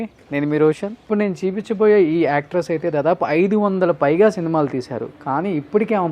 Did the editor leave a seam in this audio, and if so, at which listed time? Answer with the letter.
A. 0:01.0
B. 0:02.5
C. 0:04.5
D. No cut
A